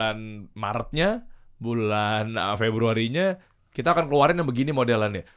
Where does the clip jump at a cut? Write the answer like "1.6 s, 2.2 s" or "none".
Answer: none